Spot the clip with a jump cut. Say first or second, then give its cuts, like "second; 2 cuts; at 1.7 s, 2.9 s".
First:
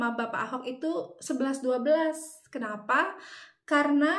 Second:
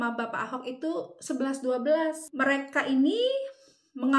second; 1 cut; at 2.3 s